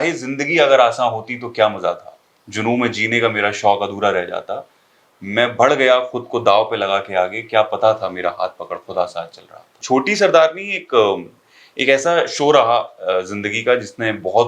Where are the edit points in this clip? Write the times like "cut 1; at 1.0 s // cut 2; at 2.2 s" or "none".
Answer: cut 1; at 9.8 s